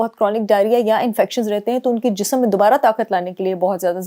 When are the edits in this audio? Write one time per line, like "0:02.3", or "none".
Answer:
none